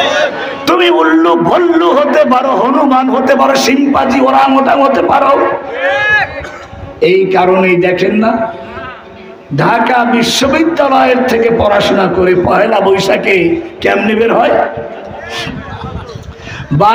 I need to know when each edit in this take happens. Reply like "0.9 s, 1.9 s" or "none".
none